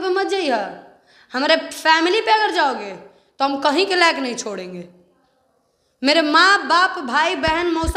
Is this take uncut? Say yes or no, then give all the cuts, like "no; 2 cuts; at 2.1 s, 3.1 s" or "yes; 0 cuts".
yes; 0 cuts